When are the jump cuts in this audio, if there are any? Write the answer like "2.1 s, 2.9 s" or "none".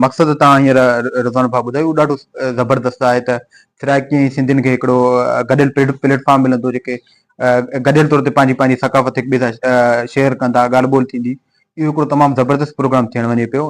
none